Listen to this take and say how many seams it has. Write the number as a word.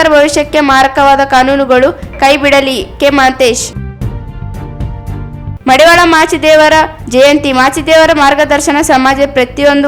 two